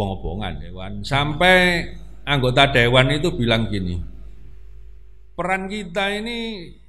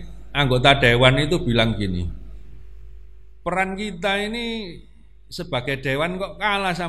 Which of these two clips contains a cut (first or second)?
first